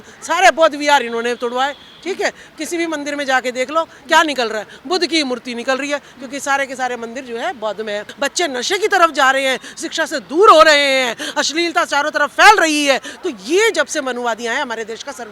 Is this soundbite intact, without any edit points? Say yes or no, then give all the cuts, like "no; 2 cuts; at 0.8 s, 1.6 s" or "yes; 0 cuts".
no; 1 cut; at 8.1 s